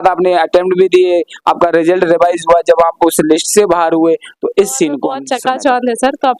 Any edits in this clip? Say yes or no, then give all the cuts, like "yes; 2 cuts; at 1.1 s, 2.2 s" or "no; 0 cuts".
yes; 1 cut; at 5.3 s